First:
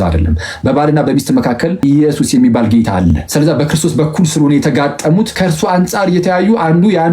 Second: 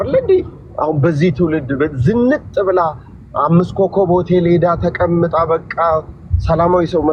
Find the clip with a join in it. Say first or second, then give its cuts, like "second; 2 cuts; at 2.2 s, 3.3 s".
first; 3 cuts; at 1.8 s, 3.2 s, 5.3 s